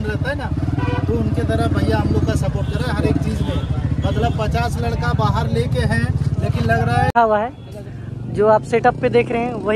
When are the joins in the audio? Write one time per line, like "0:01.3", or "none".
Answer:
0:07.1